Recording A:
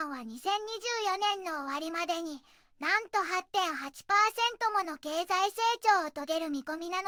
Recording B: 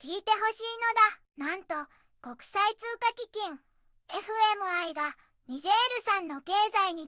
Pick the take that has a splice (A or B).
B